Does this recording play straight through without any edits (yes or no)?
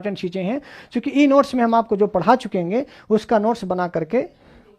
yes